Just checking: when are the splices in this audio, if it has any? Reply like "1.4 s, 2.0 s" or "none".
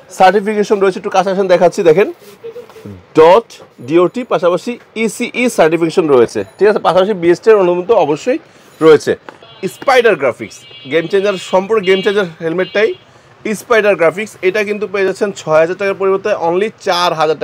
9.4 s